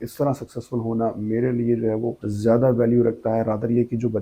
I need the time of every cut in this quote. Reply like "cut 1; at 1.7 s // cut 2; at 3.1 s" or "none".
cut 1; at 2.2 s